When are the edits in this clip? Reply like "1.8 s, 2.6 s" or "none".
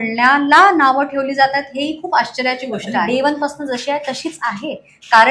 3.1 s